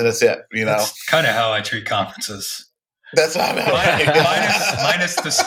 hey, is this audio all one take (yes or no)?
yes